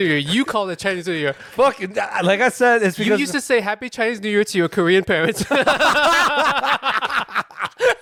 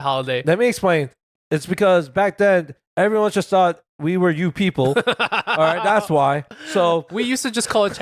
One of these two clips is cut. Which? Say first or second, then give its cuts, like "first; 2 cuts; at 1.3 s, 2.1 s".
second; 2 cuts; at 1.2 s, 7.1 s